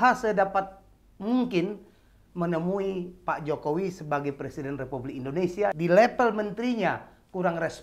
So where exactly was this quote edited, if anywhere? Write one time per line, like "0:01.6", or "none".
0:05.7